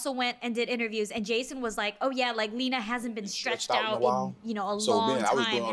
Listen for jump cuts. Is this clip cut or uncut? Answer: uncut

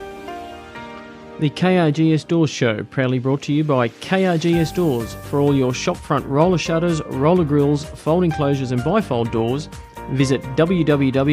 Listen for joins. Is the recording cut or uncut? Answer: cut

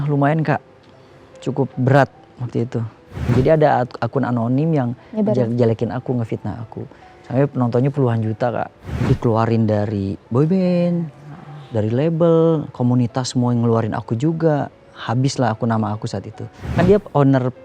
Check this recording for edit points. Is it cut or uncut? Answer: cut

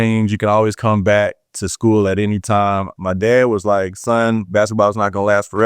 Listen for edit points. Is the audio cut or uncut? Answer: cut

